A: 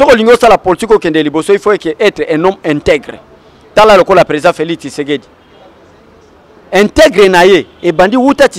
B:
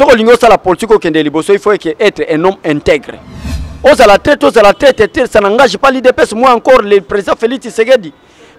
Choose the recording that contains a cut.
B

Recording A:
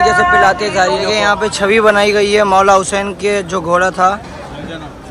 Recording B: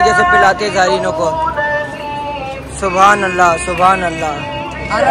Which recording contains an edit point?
A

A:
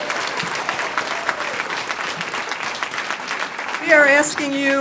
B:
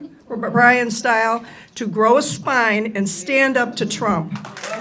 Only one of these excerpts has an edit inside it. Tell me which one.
A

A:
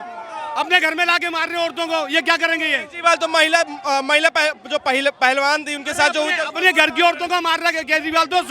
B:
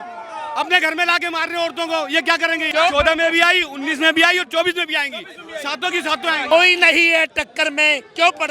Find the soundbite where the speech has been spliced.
B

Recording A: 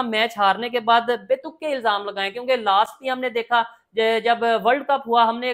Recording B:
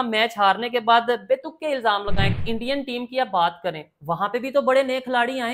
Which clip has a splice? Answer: B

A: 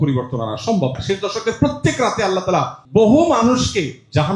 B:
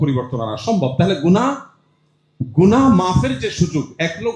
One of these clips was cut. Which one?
A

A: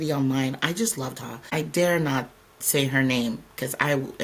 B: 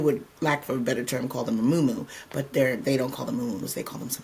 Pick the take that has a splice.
A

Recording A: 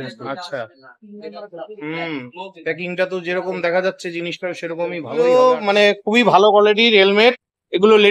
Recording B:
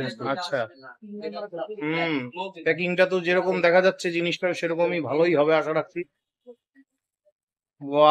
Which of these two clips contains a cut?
A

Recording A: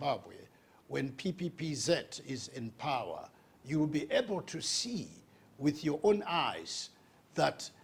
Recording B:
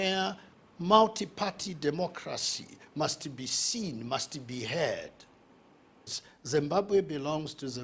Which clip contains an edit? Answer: B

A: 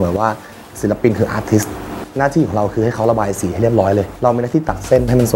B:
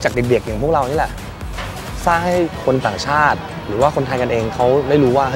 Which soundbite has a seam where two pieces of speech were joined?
A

